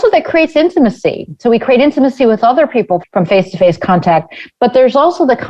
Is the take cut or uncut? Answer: cut